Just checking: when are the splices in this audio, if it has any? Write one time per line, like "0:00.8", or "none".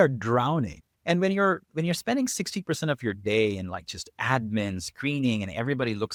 none